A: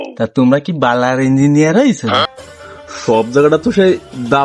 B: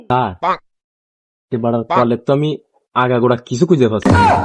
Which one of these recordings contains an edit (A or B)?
A